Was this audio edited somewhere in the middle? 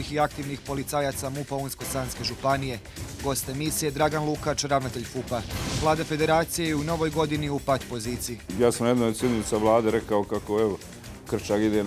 yes; 1 cut; at 5.6 s

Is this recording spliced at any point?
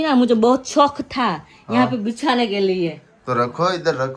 no; 0 cuts

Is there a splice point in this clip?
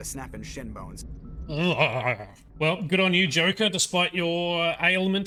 no; 0 cuts

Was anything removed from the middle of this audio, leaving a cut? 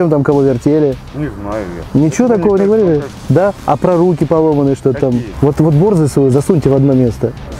yes; 2 cuts; at 3.2 s, 5.3 s

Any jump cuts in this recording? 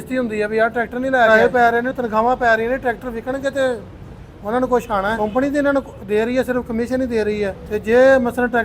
yes; 3 cuts; at 1.3 s, 5.2 s, 7.6 s

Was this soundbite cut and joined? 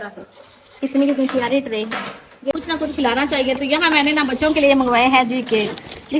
yes; 1 cut; at 2.5 s

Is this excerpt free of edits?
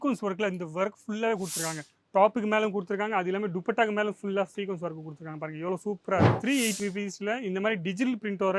no; 1 cut; at 6.3 s

